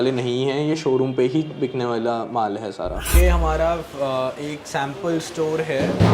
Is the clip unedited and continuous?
no; 1 cut; at 3.0 s

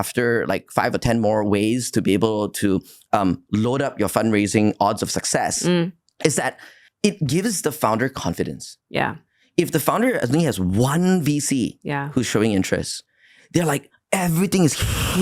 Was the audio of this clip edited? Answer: no; 0 cuts

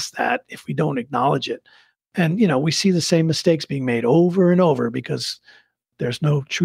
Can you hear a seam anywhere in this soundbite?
no; 0 cuts

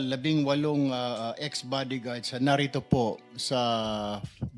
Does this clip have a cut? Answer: no; 0 cuts

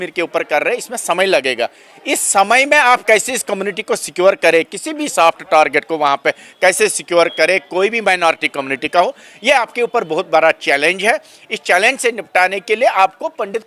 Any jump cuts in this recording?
no; 0 cuts

